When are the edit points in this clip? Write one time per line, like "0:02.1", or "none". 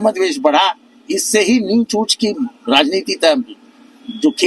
none